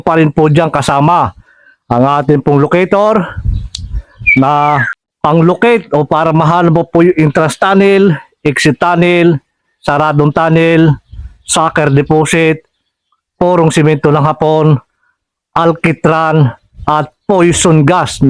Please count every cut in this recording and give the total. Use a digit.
0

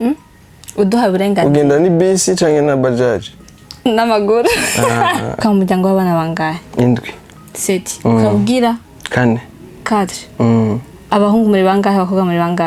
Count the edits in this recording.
1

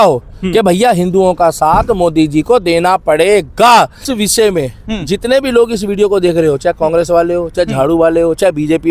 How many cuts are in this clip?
1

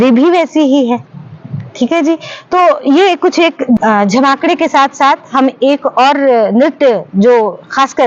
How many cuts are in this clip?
1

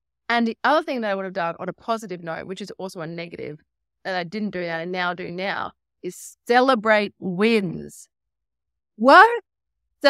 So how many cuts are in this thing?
1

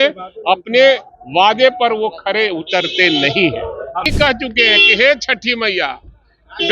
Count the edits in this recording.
1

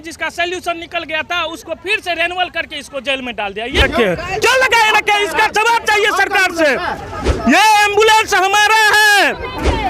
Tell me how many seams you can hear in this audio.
1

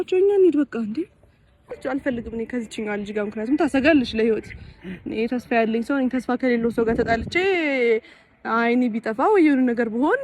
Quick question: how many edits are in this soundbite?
1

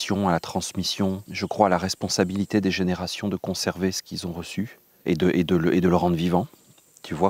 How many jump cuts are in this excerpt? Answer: 2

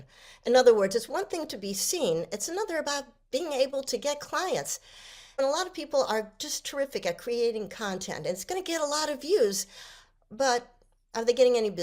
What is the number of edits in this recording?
1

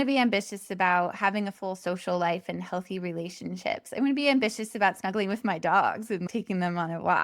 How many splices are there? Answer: 1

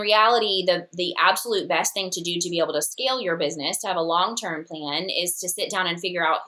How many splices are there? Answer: 0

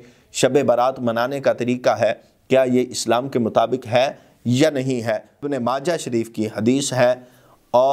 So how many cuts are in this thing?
1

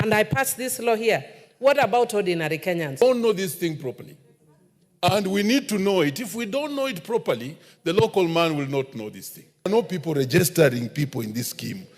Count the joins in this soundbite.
2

